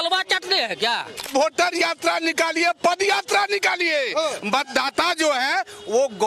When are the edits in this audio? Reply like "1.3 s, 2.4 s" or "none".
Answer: 1.3 s

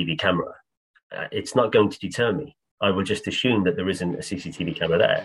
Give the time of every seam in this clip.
none

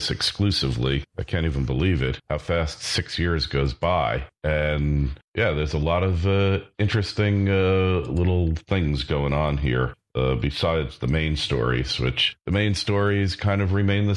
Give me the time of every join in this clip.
none

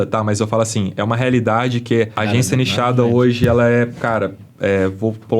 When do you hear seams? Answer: 2.2 s

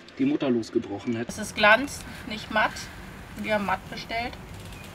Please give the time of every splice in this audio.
1.3 s

